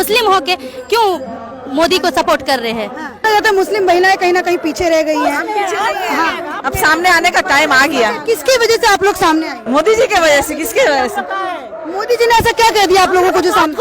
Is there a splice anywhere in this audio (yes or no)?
yes